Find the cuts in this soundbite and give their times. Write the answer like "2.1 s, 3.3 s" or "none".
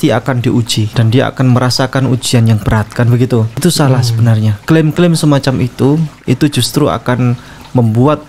0.9 s, 3.6 s, 4.6 s